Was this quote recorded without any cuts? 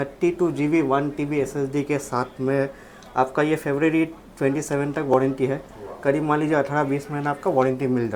yes; 0 cuts

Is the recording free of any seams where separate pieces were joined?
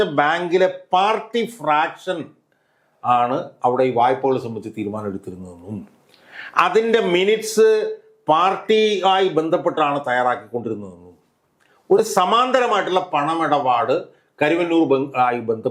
yes; 0 cuts

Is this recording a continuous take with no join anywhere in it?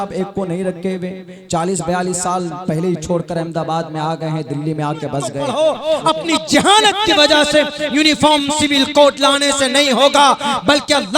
no; 1 cut; at 5.4 s

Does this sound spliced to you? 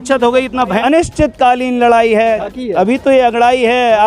yes; 2 cuts; at 0.8 s, 2.4 s

